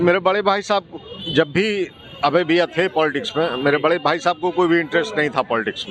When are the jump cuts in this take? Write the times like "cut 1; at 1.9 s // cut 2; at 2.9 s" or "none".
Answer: none